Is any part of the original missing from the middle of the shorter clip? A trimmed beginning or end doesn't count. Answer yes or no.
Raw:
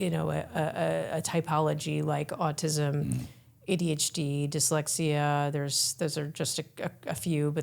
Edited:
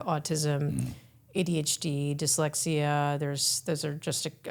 no